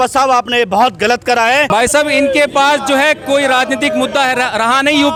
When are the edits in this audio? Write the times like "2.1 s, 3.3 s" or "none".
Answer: none